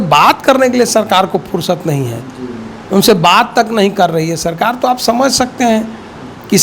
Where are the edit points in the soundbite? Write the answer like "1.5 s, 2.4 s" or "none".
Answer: none